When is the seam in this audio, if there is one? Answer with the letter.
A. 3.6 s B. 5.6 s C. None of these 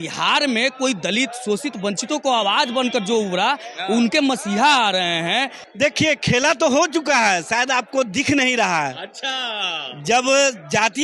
B